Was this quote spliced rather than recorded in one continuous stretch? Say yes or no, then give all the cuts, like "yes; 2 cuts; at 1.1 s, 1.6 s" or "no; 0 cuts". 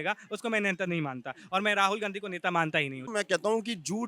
yes; 1 cut; at 3.1 s